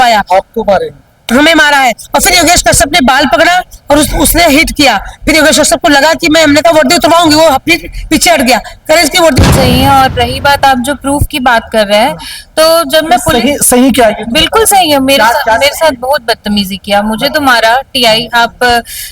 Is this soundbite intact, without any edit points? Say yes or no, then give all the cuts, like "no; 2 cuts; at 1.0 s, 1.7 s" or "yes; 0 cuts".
no; 1 cut; at 9.4 s